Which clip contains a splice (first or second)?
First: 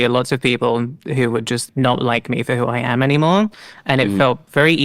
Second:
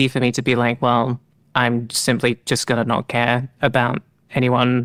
first